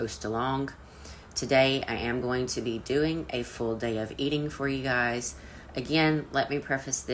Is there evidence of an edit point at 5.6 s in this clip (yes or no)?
no